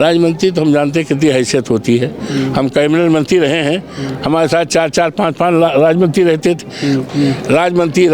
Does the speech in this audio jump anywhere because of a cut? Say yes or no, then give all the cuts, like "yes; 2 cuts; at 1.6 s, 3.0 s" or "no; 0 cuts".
yes; 1 cut; at 7.1 s